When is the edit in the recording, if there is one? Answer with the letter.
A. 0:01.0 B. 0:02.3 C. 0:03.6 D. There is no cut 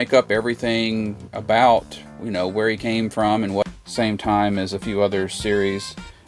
C